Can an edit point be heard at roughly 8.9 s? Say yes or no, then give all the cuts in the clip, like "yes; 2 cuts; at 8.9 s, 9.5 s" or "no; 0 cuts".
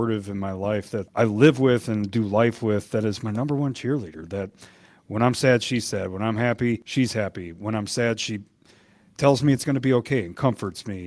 no; 2 cuts; at 1.1 s, 6.8 s